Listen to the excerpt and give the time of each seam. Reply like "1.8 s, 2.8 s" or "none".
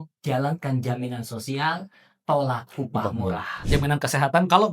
3.5 s